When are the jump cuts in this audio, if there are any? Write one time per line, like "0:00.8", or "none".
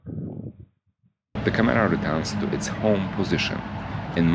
0:01.3